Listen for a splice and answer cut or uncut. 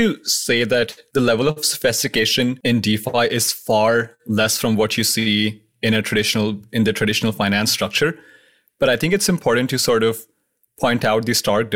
cut